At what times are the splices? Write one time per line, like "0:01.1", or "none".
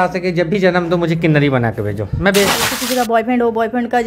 0:02.7